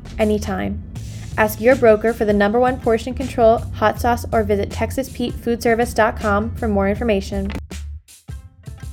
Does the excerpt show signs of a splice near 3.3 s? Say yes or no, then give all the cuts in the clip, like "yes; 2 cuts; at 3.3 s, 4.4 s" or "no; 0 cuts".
no; 1 cut; at 7.5 s